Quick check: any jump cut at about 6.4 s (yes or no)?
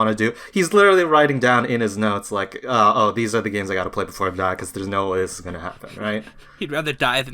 yes